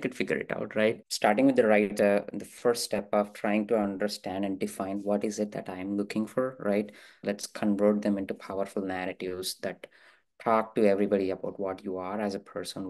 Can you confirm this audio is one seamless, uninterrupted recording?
no; 2 cuts; at 1.1 s, 7.1 s

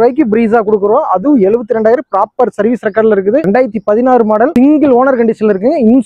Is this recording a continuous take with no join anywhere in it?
yes; 0 cuts

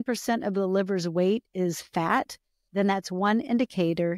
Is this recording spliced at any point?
no; 0 cuts

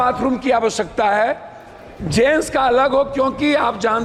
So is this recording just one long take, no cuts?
yes; 0 cuts

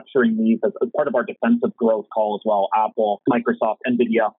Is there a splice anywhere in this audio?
yes; 1 cut; at 3.2 s

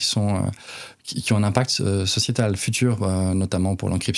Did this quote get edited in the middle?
no; 0 cuts

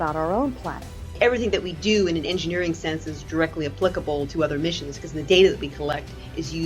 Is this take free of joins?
no; 1 cut; at 1.2 s

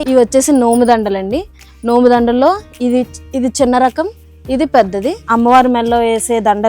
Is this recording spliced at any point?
yes; 1 cut; at 5.2 s

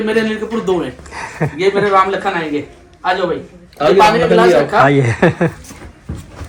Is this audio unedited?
yes; 0 cuts

